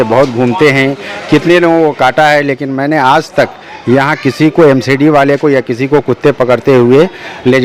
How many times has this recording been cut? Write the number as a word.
zero